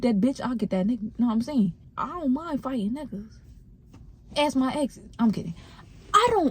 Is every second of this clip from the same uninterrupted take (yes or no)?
no